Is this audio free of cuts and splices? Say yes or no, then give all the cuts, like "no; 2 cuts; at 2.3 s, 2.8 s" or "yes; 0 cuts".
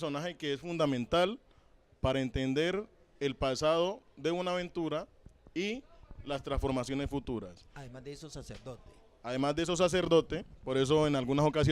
no; 1 cut; at 4.1 s